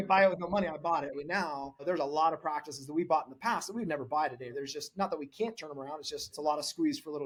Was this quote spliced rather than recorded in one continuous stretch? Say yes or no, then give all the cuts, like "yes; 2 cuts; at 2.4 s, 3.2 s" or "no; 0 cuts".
no; 0 cuts